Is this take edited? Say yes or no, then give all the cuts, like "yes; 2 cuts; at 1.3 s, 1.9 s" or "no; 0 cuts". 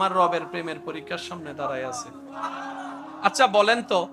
yes; 1 cut; at 3.0 s